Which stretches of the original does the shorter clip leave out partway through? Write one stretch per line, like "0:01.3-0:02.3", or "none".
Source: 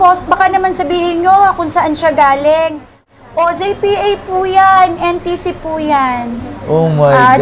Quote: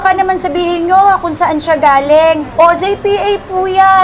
0:02.8-0:03.2